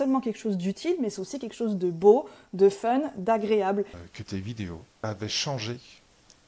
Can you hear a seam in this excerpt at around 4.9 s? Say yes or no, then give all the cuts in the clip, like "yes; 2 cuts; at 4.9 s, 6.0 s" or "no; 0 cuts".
yes; 2 cuts; at 4.0 s, 4.9 s